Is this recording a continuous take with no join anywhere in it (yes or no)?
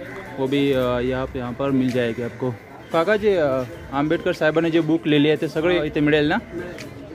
no